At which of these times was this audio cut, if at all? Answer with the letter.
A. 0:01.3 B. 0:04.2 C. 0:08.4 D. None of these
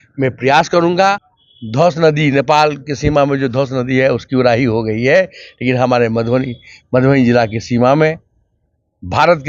A